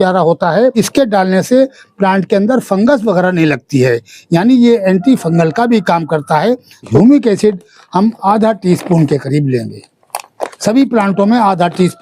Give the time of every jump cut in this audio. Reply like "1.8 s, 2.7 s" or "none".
0.7 s, 6.9 s